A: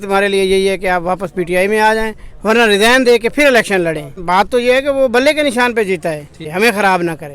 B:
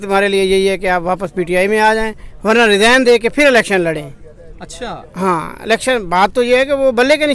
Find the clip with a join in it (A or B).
A